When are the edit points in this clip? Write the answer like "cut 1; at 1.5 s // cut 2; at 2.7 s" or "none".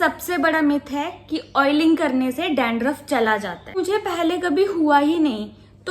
cut 1; at 3.7 s